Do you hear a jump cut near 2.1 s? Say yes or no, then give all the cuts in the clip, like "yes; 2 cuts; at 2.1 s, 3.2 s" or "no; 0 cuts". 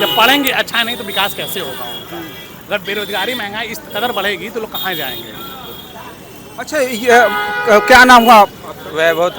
no; 0 cuts